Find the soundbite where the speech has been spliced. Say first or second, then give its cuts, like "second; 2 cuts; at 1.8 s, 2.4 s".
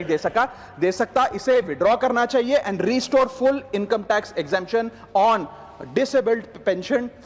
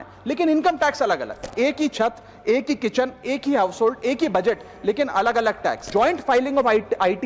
second; 2 cuts; at 1.5 s, 5.8 s